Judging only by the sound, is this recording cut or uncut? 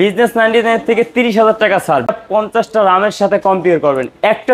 cut